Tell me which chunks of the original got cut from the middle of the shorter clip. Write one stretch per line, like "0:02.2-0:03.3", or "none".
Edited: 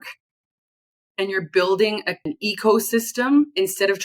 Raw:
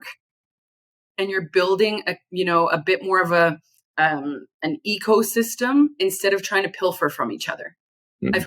0:02.2-0:04.7